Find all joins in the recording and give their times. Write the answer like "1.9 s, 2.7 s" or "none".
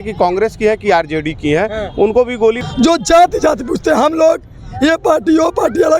2.6 s